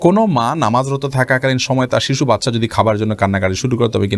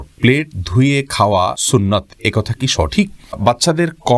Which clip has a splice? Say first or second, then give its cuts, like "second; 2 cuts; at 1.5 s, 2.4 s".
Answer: second; 2 cuts; at 1.6 s, 3.4 s